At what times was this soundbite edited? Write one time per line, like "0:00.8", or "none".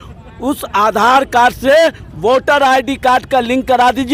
none